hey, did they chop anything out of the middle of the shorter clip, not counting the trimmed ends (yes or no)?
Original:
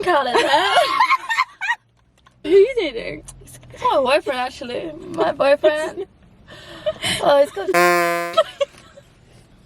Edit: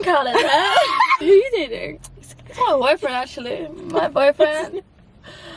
yes